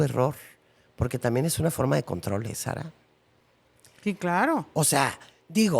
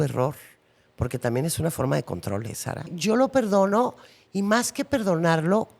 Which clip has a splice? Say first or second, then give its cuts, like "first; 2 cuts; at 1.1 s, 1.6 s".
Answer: second; 1 cut; at 2.9 s